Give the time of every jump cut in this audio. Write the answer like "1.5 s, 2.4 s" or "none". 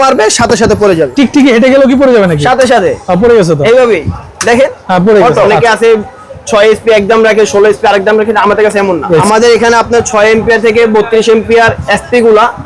1.1 s, 5.5 s, 9.2 s